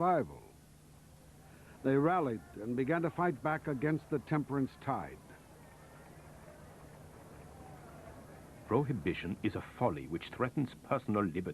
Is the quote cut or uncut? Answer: cut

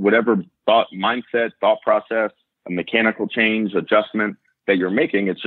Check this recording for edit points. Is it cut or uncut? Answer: uncut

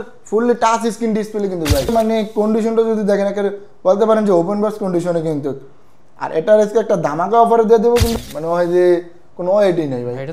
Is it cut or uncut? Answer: cut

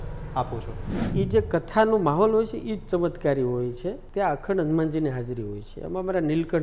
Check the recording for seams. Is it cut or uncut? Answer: cut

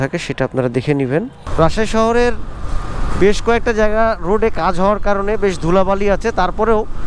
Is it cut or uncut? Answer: cut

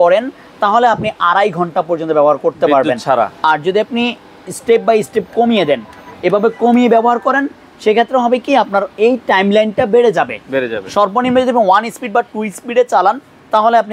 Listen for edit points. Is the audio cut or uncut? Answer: uncut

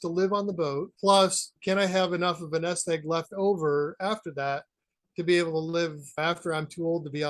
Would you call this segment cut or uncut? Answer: cut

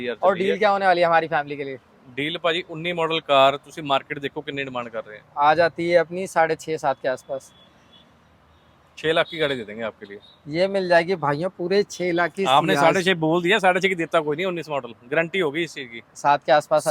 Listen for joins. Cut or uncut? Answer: uncut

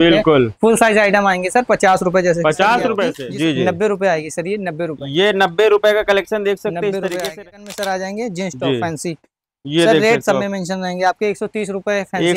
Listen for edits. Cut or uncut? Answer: cut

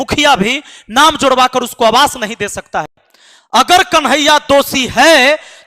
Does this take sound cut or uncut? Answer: cut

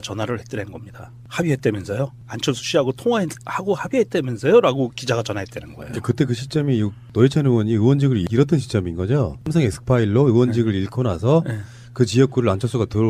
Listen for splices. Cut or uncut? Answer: cut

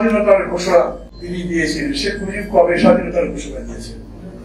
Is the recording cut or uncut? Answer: cut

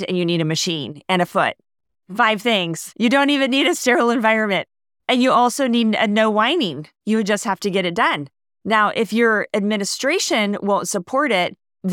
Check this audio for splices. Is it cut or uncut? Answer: cut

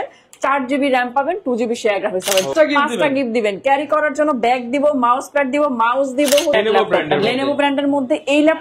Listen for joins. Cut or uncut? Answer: cut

